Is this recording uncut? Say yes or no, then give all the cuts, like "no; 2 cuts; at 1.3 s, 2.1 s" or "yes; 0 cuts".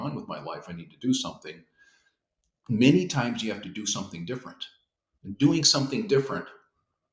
yes; 0 cuts